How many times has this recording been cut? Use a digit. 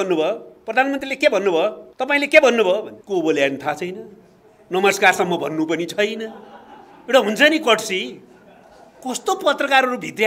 2